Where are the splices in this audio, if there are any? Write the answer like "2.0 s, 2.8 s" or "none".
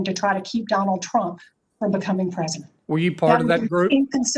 none